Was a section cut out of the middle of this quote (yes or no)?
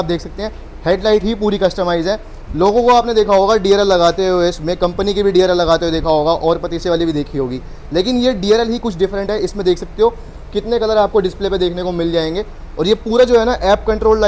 no